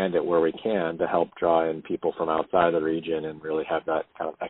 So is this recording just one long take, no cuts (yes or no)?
yes